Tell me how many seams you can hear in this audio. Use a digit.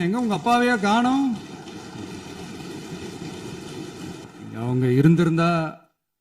1